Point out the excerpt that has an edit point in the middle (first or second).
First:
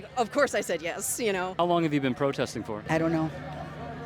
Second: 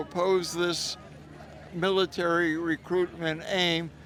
first